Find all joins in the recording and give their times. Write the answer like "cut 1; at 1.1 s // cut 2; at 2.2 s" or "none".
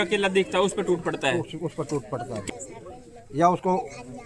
cut 1; at 2.4 s